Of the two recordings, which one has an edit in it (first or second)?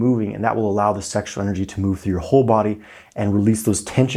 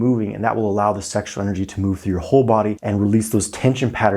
second